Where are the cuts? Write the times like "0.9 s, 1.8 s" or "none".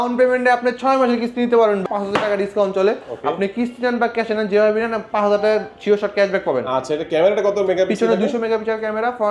1.9 s